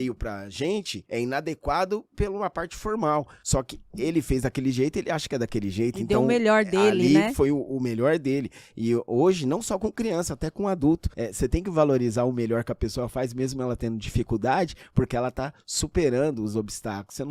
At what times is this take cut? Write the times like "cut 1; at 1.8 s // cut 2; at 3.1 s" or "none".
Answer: cut 1; at 1.0 s // cut 2; at 3.4 s // cut 3; at 11.2 s